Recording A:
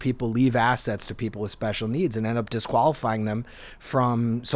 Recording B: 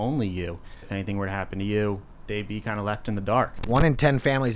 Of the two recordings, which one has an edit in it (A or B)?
B